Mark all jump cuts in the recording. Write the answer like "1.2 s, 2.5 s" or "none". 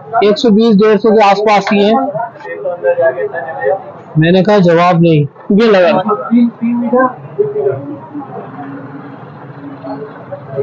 2.5 s, 6.0 s

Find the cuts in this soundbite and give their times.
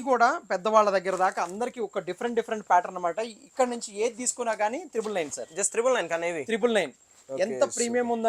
none

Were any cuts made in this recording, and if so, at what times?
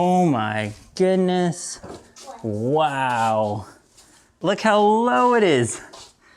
4.3 s

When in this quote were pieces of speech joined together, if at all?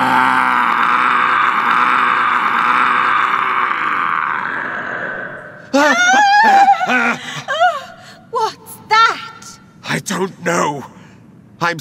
9.1 s

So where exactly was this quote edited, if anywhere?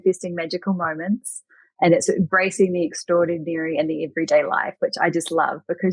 none

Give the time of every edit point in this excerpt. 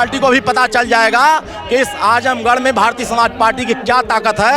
none

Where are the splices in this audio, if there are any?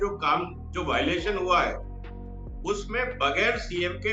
none

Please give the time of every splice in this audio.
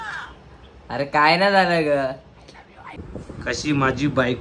3.0 s

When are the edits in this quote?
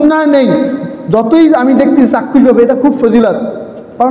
none

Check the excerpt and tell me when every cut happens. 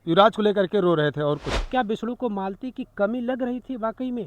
1.5 s

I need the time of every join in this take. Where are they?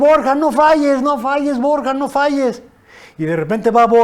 none

